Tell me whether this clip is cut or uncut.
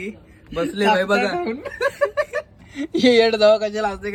uncut